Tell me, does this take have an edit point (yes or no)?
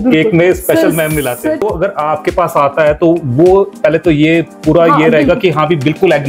yes